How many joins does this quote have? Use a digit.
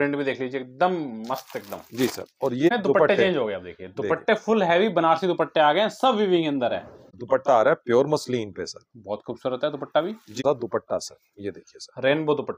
3